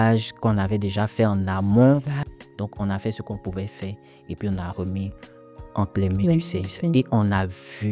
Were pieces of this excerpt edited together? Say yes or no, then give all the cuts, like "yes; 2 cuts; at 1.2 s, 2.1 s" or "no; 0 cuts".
yes; 1 cut; at 2.2 s